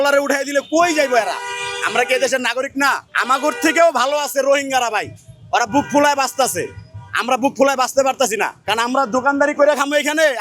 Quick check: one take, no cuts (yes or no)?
yes